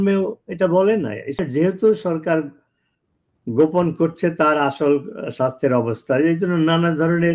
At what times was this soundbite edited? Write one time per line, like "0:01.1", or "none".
0:01.4